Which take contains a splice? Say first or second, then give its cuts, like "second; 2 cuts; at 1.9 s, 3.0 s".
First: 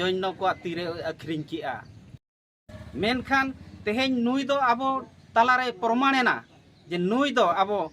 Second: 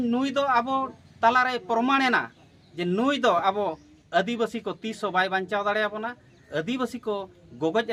first; 1 cut; at 2.6 s